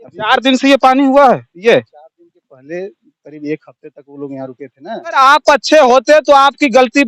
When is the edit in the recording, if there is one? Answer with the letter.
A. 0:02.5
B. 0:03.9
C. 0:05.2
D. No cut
C